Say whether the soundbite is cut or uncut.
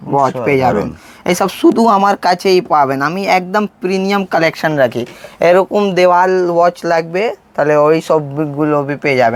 uncut